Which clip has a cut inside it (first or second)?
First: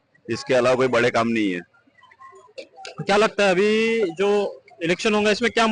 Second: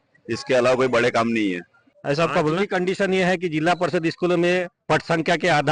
second